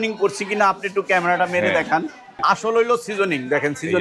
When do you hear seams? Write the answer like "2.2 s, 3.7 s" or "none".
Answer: 2.2 s